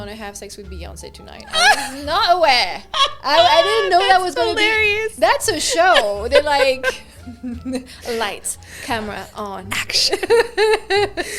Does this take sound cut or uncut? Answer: uncut